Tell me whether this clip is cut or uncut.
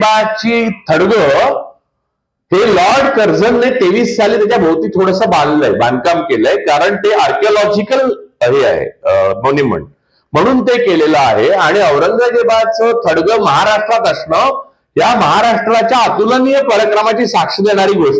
uncut